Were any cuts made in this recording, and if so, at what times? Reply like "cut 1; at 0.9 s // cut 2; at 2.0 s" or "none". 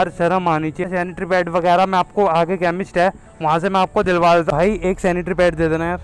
cut 1; at 0.9 s // cut 2; at 4.5 s

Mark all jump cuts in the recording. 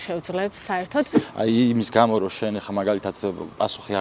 cut 1; at 1.2 s

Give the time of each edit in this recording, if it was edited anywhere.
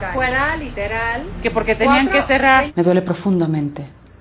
cut 1; at 1.3 s // cut 2; at 2.7 s

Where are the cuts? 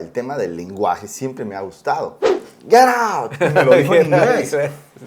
cut 1; at 2.5 s

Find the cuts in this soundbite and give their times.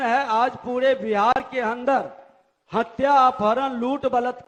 none

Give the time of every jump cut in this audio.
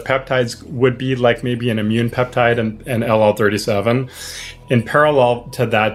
cut 1; at 4.5 s

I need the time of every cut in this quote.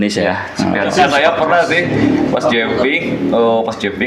cut 1; at 0.9 s

